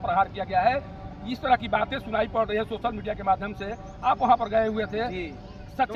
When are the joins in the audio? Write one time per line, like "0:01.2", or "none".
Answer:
none